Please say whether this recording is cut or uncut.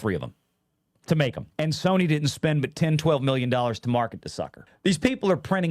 cut